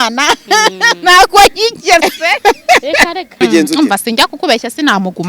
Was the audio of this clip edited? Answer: yes; 1 cut; at 3.4 s

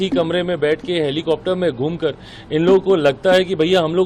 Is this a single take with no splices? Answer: yes; 0 cuts

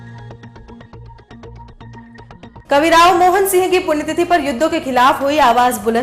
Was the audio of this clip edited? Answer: no; 0 cuts

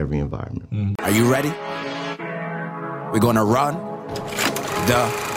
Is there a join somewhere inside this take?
yes; 1 cut; at 1.0 s

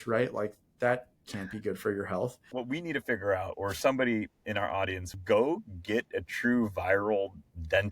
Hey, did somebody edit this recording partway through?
yes; 2 cuts; at 2.4 s, 5.1 s

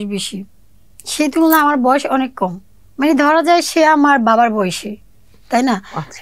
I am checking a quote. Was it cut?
no; 0 cuts

